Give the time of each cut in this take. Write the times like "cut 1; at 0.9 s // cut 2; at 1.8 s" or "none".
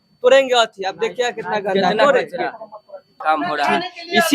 cut 1; at 3.0 s

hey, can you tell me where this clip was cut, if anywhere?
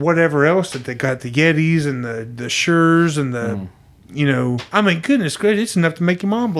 cut 1; at 4.7 s

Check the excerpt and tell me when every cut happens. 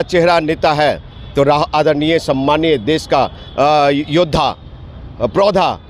none

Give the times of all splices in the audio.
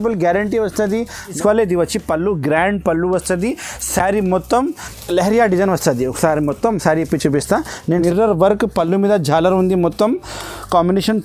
cut 1; at 1.4 s // cut 2; at 4.9 s // cut 3; at 7.9 s

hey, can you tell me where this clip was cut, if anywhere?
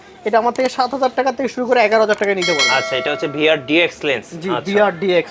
none

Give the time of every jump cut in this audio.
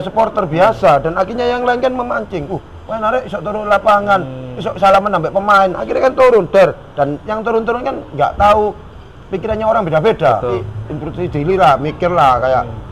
cut 1; at 10.6 s

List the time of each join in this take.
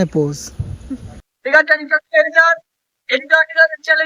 cut 1; at 1.2 s

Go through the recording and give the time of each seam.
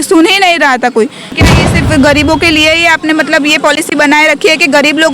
cut 1; at 1.3 s

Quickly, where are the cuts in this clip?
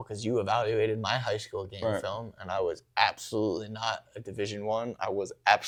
none

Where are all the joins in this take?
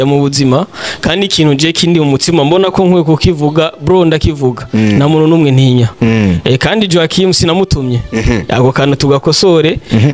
none

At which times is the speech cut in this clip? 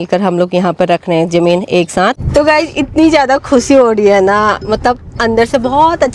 cut 1; at 2.2 s

